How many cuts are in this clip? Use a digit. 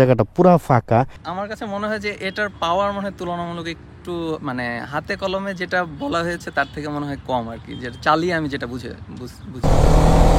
2